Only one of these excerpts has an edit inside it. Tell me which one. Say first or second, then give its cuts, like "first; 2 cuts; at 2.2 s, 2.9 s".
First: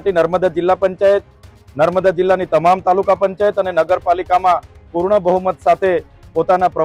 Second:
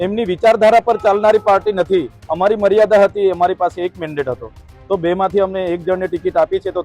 second; 1 cut; at 2.2 s